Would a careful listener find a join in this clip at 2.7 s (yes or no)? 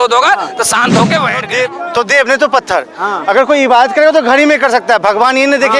no